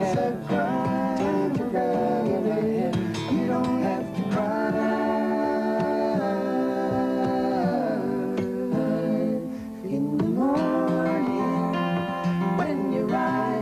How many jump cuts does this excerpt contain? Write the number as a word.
zero